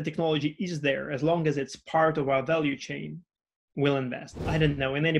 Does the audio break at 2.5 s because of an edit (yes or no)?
no